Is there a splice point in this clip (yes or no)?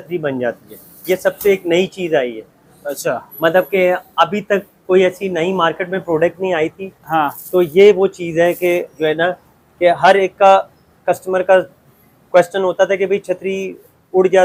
no